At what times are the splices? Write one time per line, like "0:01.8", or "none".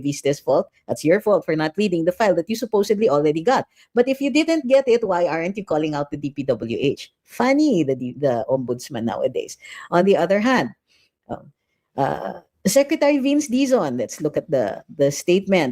none